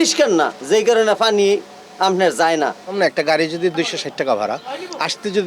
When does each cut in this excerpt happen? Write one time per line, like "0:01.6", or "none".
none